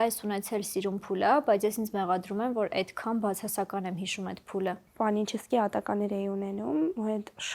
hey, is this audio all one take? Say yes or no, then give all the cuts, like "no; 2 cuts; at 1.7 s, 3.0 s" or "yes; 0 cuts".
no; 1 cut; at 4.5 s